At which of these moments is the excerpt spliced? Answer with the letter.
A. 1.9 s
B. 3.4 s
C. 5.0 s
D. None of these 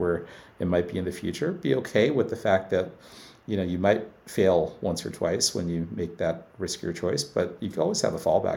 D